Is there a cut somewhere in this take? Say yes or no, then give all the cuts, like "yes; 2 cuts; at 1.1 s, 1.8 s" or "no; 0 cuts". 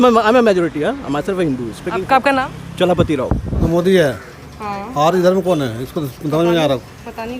yes; 1 cut; at 3.6 s